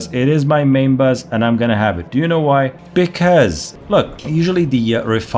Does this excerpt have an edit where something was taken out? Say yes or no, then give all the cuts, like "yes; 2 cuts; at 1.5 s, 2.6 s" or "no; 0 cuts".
no; 0 cuts